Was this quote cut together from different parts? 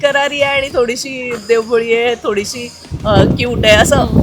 no; 0 cuts

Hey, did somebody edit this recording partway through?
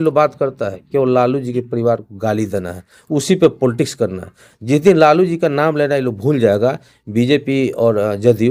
no; 0 cuts

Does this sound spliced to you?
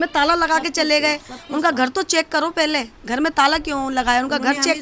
no; 0 cuts

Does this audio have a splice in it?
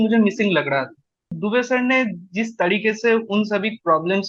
yes; 1 cut; at 1.4 s

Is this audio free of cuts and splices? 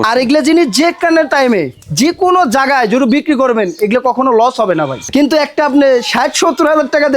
no; 1 cut; at 5.0 s

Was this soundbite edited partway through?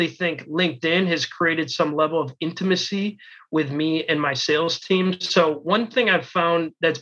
no; 0 cuts

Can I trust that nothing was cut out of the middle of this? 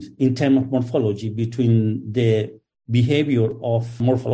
yes; 0 cuts

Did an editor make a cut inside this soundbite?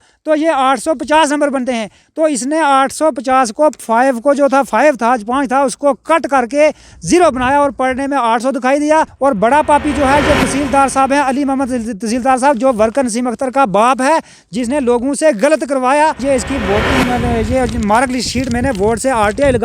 yes; 2 cuts; at 9.1 s, 16.2 s

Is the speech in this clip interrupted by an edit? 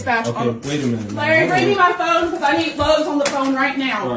no; 0 cuts

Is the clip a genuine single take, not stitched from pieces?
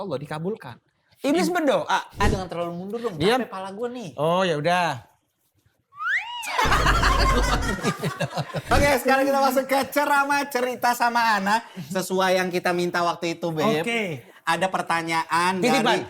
no; 2 cuts; at 2.2 s, 8.7 s

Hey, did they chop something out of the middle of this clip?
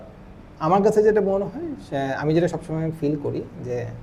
no; 0 cuts

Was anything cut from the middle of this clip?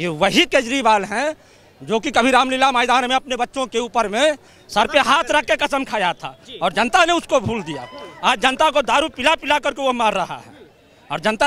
no; 0 cuts

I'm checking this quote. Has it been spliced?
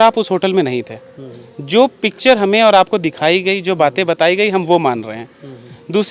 no; 0 cuts

